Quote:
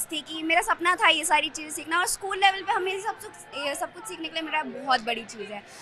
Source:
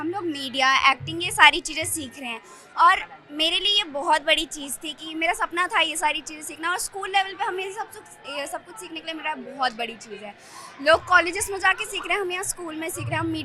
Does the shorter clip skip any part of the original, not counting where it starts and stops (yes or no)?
no